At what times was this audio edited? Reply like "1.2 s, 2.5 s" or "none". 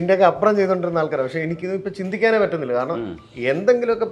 1.5 s